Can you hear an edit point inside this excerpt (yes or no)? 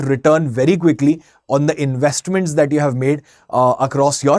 no